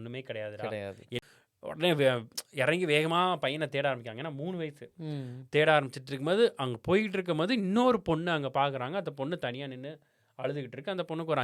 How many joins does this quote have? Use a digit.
1